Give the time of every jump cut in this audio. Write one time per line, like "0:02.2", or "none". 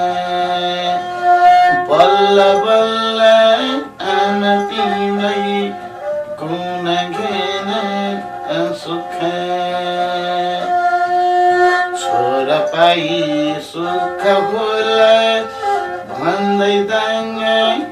none